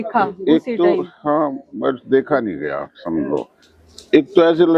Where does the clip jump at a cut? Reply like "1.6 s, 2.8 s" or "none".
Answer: none